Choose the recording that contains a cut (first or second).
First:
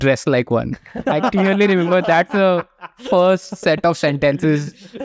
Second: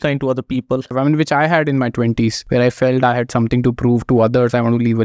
second